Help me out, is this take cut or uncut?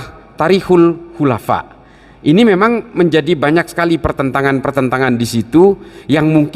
uncut